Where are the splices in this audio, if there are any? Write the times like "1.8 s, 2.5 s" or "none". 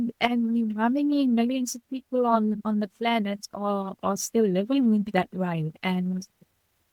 none